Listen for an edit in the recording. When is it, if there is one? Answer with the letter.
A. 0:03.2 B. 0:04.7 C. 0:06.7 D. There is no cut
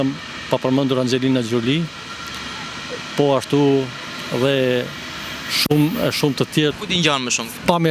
C